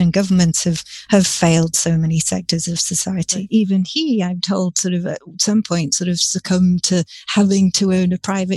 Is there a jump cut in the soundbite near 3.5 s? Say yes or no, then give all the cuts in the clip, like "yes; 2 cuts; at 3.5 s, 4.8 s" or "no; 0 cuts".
yes; 1 cut; at 3.5 s